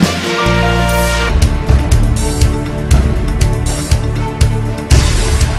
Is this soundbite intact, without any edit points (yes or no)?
no